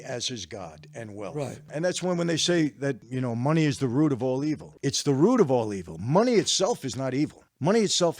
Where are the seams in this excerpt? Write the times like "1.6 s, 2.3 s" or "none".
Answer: 1.7 s, 3.1 s, 4.7 s